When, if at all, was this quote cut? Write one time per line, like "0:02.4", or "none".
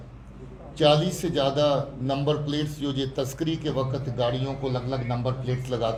none